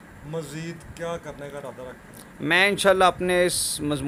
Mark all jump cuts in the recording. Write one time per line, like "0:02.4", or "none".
none